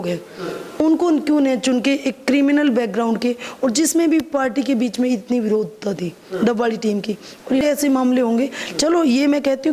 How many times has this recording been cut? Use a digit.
1